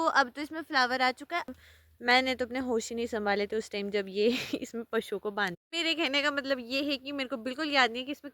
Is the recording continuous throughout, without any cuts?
no; 1 cut; at 1.5 s

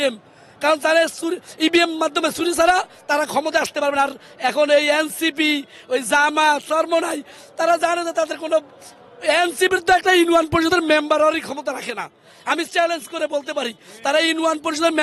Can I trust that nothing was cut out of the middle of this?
yes; 0 cuts

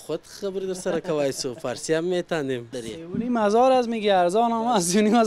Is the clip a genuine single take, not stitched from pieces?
no; 1 cut; at 2.8 s

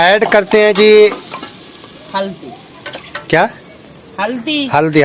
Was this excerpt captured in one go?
yes; 0 cuts

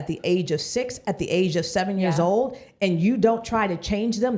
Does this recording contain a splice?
no; 0 cuts

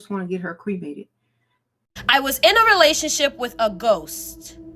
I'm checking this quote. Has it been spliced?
yes; 1 cut; at 1.8 s

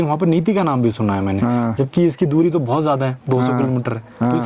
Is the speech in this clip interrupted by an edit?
no; 0 cuts

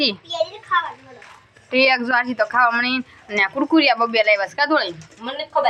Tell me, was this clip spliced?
no; 0 cuts

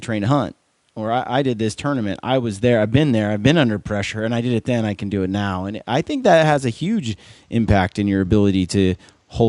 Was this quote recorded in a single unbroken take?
yes; 0 cuts

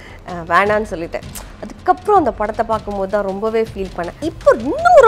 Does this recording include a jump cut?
yes; 1 cut; at 4.1 s

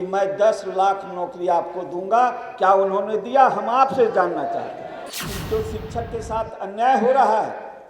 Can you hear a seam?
yes; 1 cut; at 5.1 s

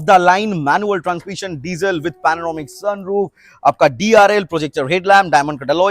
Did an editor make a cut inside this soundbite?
no; 0 cuts

